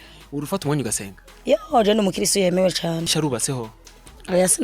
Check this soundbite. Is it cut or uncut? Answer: cut